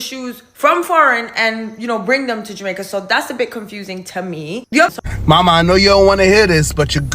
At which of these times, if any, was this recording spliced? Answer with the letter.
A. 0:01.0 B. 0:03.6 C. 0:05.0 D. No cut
C